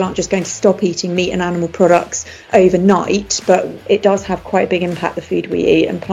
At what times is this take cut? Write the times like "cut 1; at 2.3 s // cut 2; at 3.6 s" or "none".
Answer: cut 1; at 3.7 s